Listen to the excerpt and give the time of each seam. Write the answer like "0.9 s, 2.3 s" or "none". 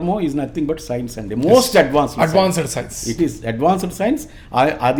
none